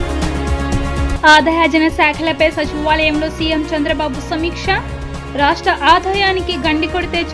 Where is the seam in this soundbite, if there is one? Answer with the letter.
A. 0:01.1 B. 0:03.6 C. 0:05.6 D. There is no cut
A